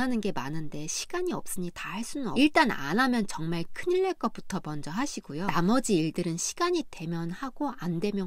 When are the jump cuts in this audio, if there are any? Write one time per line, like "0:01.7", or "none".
0:02.3
0:05.5